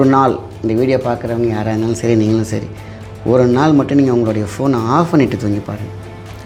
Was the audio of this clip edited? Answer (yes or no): no